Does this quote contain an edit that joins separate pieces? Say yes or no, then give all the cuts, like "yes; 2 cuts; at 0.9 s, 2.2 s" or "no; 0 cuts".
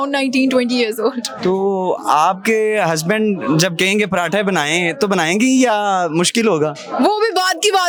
no; 0 cuts